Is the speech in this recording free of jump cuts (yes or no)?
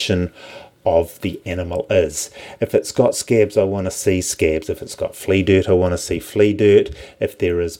yes